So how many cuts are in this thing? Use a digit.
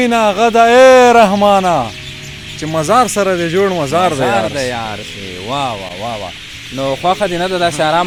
0